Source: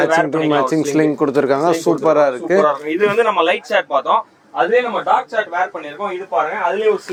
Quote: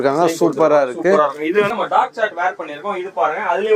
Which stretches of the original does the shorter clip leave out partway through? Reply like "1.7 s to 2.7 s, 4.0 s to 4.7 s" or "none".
3.1 s to 4.8 s